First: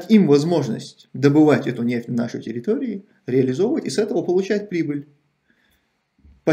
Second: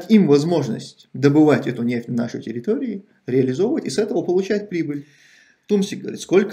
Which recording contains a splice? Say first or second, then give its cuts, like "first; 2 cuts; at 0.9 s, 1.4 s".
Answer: second; 1 cut; at 5.5 s